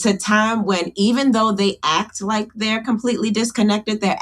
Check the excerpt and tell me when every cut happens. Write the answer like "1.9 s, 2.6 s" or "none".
none

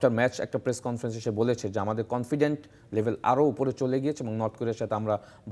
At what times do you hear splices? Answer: none

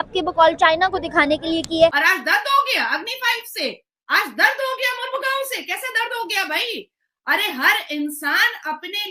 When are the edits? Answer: 2.0 s

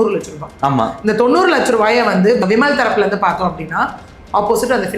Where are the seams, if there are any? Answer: 2.4 s

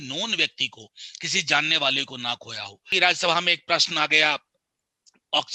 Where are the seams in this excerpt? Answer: 2.9 s

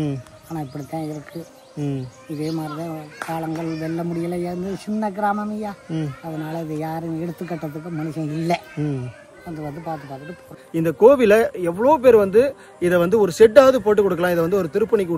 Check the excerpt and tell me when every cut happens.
10.5 s

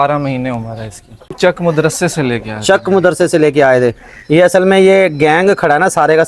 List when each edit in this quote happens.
1.3 s

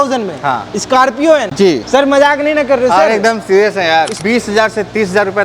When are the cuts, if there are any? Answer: 4.2 s

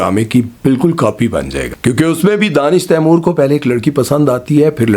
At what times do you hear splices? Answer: 1.6 s

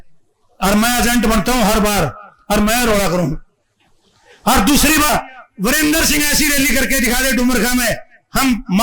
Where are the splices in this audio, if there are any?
5.1 s

